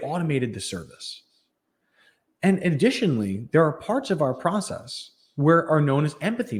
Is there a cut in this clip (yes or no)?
no